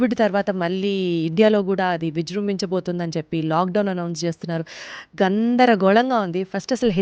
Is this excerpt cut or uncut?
uncut